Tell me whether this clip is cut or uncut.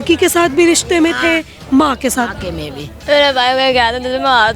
cut